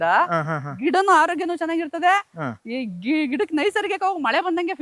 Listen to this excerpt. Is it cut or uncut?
uncut